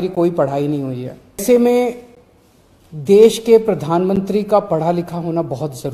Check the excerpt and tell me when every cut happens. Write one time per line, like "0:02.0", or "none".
0:01.4